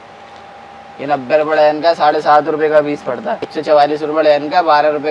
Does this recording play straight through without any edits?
no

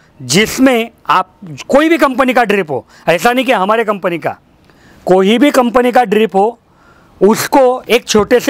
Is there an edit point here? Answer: no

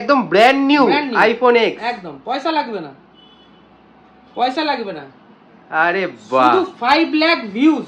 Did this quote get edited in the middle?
no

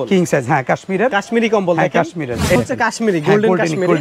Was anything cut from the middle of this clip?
yes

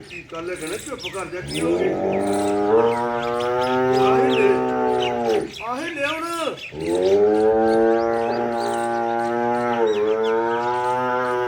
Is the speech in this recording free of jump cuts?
yes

